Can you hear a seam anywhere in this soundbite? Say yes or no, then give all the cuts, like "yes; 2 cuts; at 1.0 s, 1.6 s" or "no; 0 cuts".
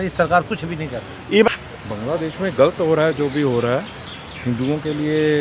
yes; 1 cut; at 1.5 s